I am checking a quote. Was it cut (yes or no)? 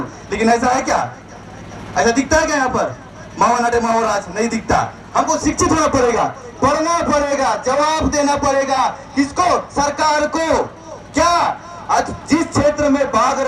no